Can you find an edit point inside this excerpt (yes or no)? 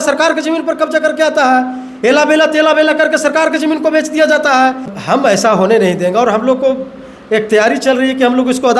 yes